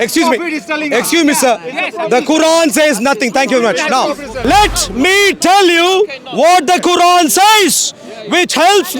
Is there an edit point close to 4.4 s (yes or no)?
yes